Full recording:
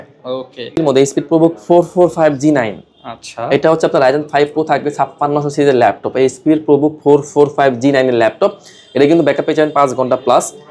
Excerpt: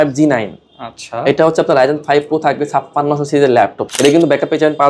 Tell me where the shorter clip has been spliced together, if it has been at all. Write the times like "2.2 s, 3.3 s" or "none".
3.8 s